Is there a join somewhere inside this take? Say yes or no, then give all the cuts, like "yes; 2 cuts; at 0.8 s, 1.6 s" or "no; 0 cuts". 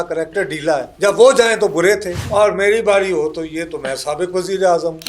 yes; 2 cuts; at 0.9 s, 2.1 s